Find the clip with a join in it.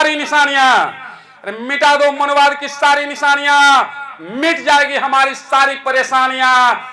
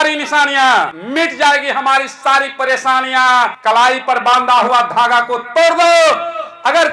second; 2 cuts; at 1.0 s, 3.6 s

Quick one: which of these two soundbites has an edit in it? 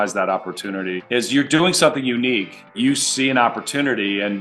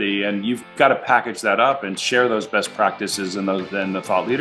first; 2 cuts; at 1.0 s, 2.8 s

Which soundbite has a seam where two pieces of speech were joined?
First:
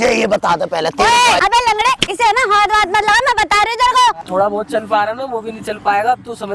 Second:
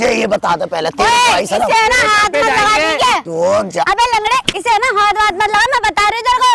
first; 2 cuts; at 1.4 s, 4.2 s

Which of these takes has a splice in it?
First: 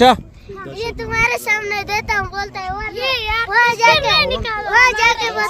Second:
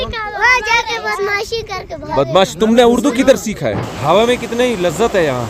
second; 1 cut; at 3.9 s

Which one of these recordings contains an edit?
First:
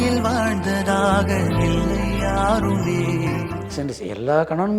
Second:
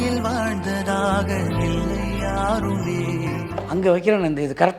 first; 1 cut; at 3.6 s

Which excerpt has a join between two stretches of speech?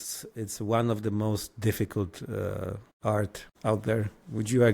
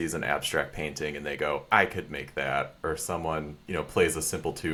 first; 2 cuts; at 2.9 s, 3.4 s

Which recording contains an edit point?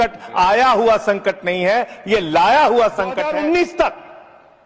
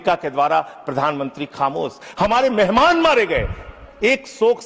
first; 1 cut; at 3.2 s

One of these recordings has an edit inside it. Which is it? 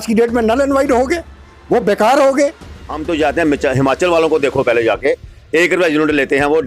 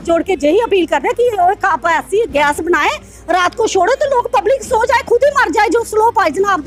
first; 1 cut; at 2.6 s

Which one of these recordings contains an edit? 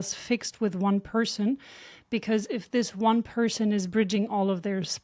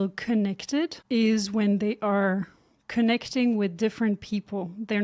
second; 1 cut; at 1.0 s

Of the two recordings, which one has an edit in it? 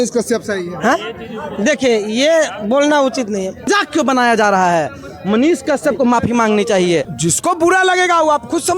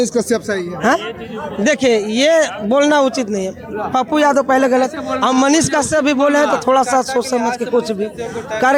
first; 2 cuts; at 3.7 s, 7.2 s

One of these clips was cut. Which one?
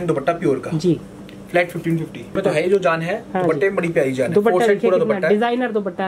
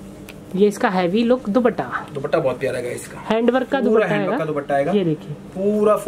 first; 1 cut; at 2.4 s

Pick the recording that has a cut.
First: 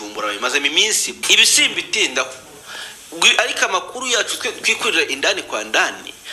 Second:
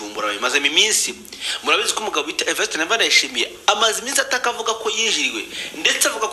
first; 1 cut; at 1.2 s

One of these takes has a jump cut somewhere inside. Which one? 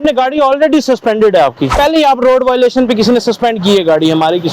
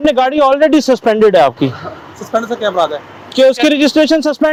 first; 1 cut; at 1.7 s

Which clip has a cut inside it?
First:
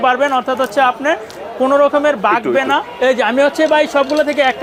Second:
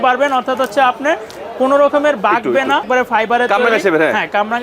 second; 1 cut; at 2.9 s

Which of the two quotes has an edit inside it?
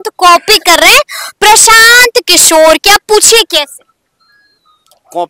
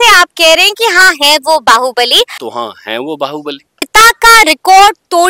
second; 2 cuts; at 2.4 s, 3.9 s

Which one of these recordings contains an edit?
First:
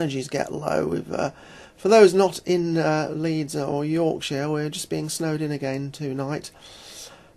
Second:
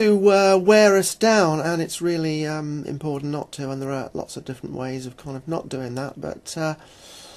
first; 1 cut; at 3.9 s

